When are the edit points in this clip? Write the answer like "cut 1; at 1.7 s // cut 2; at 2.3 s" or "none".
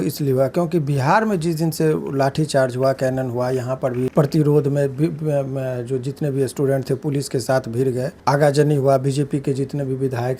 cut 1; at 4.1 s // cut 2; at 8.1 s

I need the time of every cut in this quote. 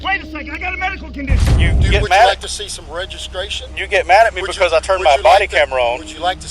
cut 1; at 1.5 s

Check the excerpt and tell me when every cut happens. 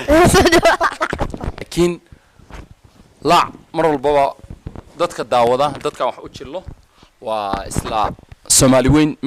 cut 1; at 1.7 s

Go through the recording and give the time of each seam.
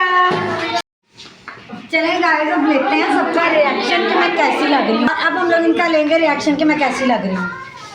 cut 1; at 0.8 s // cut 2; at 5.1 s

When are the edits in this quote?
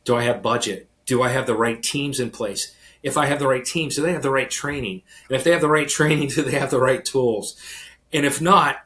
none

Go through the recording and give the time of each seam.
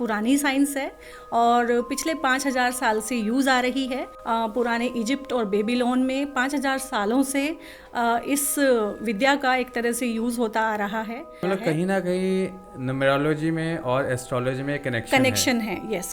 cut 1; at 4.1 s // cut 2; at 11.4 s

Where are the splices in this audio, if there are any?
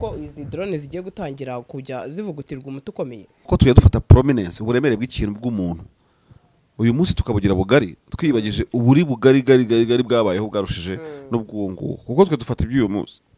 cut 1; at 3.5 s

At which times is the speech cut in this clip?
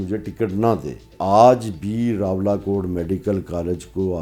cut 1; at 1.1 s

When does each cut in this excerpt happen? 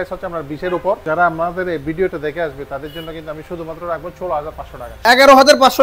cut 1; at 1.0 s // cut 2; at 5.1 s

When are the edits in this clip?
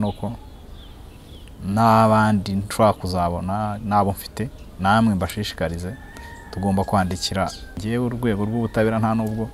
cut 1; at 7.8 s

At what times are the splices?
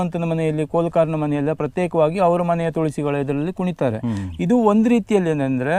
none

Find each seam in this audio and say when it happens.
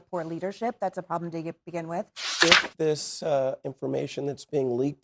cut 1; at 2.2 s

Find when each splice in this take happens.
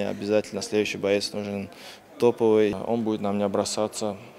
cut 1; at 2.8 s

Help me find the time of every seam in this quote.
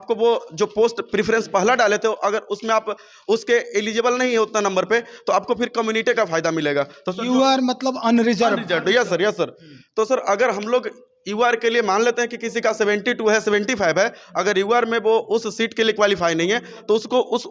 none

